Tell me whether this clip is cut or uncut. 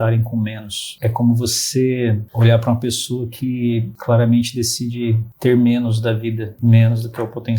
cut